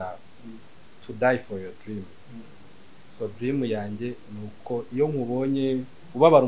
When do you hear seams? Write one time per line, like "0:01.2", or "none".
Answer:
none